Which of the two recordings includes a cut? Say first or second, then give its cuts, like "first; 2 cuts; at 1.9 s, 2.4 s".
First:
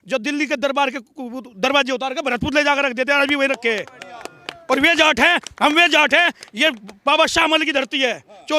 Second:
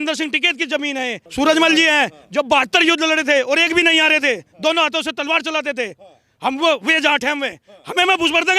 second; 1 cut; at 1.2 s